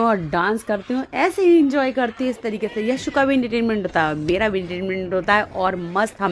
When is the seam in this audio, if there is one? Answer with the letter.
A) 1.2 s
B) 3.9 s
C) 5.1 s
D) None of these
D